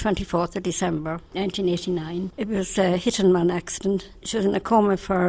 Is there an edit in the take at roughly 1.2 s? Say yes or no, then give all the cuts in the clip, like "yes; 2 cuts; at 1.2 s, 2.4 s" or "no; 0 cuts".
yes; 3 cuts; at 1.2 s, 2.3 s, 4.2 s